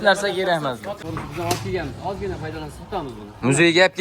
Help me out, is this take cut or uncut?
cut